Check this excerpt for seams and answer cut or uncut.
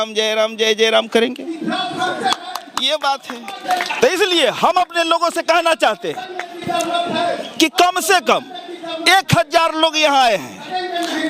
uncut